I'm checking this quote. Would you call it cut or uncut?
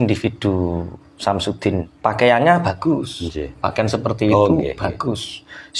cut